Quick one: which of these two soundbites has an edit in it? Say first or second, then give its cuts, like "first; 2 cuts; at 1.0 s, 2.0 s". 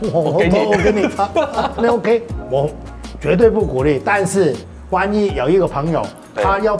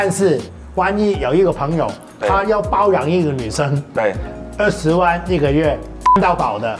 first; 1 cut; at 2.3 s